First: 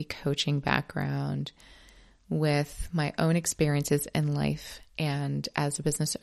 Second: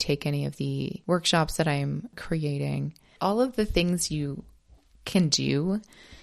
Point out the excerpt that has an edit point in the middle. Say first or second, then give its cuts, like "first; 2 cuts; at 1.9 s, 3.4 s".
second; 3 cuts; at 1.0 s, 2.2 s, 3.1 s